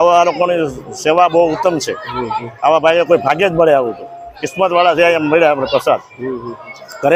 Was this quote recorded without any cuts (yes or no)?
yes